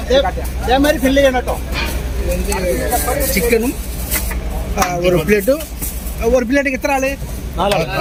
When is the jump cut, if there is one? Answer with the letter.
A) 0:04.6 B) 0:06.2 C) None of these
C